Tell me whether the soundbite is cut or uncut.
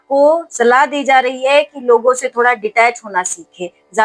uncut